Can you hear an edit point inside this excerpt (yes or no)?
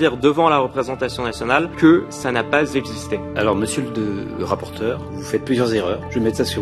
yes